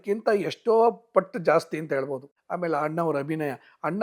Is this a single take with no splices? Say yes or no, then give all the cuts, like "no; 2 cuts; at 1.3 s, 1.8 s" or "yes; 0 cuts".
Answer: yes; 0 cuts